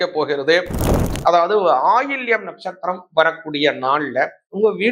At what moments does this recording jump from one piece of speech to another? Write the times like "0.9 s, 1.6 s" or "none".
0.9 s